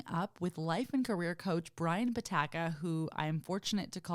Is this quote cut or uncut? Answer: uncut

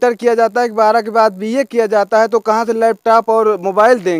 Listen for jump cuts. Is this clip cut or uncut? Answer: uncut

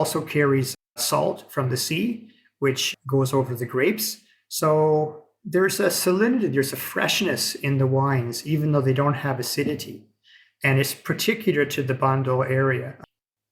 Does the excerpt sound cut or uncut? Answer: uncut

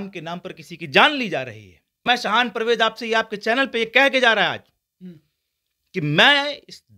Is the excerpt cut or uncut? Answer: cut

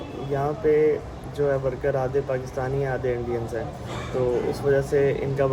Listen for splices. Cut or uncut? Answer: uncut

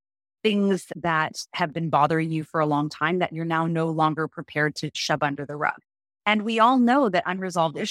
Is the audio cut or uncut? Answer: cut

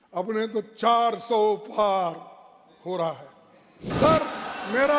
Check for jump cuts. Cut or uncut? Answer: cut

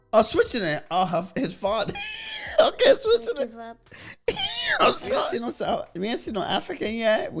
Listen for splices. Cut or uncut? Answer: cut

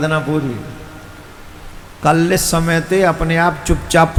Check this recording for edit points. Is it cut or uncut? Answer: uncut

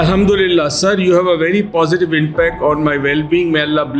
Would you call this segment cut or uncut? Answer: uncut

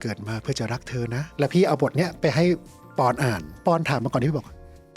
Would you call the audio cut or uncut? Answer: cut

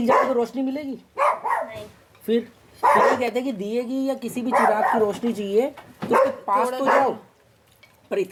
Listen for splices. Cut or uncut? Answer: uncut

